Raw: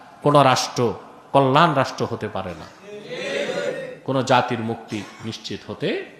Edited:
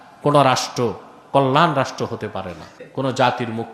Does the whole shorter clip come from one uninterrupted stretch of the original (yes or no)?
no